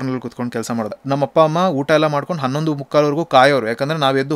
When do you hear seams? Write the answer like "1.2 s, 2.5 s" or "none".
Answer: 1.0 s